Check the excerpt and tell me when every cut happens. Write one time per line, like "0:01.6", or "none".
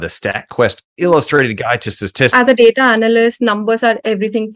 0:02.3

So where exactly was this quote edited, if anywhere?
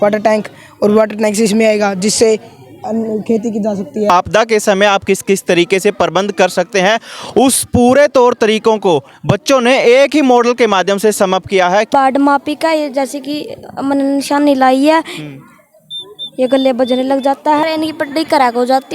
0:04.1
0:11.9
0:17.6

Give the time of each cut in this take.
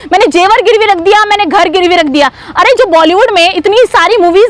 none

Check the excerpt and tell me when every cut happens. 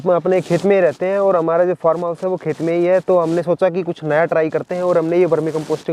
none

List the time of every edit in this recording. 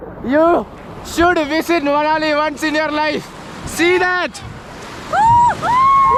none

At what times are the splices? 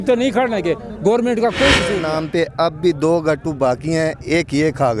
0:02.0

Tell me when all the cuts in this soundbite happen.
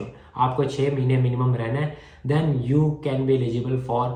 none

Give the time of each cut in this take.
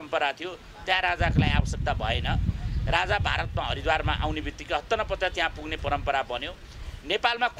none

